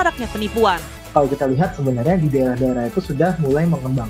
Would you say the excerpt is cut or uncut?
cut